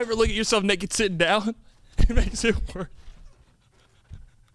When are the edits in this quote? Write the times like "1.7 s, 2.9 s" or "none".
none